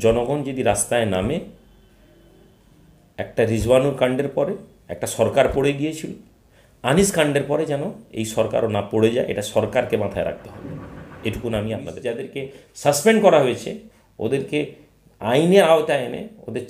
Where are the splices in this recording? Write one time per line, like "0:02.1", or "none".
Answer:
0:12.2